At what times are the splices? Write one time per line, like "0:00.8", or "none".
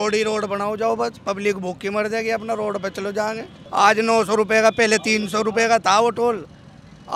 0:03.5